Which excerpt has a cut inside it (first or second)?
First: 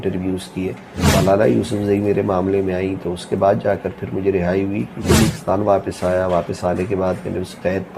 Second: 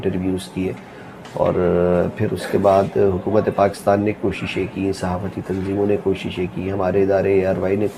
first